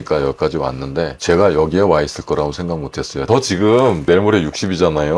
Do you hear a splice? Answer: yes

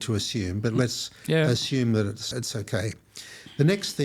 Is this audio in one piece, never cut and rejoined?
no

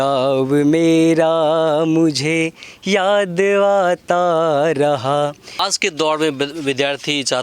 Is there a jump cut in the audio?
yes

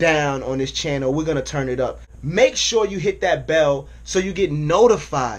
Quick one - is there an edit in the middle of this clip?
yes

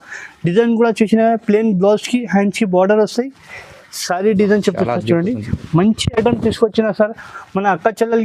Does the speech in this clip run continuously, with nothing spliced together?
yes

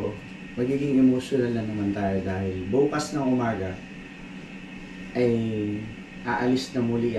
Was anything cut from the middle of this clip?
no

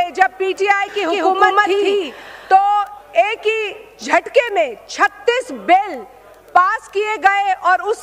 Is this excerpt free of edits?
yes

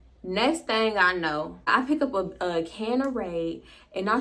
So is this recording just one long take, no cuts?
no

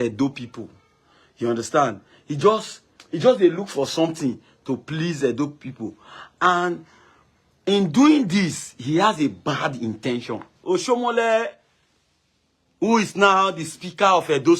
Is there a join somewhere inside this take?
yes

